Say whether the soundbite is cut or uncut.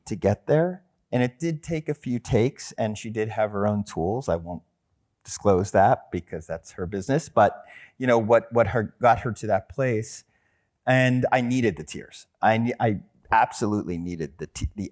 uncut